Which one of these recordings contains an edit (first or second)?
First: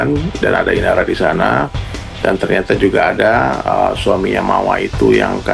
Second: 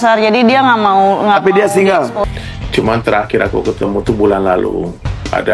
second